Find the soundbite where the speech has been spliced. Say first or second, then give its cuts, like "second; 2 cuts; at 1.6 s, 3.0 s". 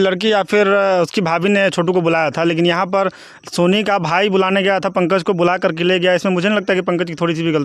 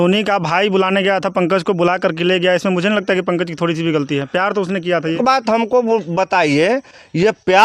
second; 1 cut; at 5.2 s